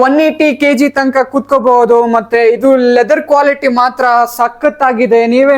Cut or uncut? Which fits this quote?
uncut